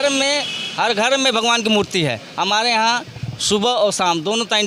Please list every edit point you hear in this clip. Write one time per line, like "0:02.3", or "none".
none